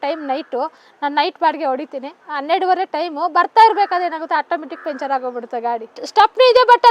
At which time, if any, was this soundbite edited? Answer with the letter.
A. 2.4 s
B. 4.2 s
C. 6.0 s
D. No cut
C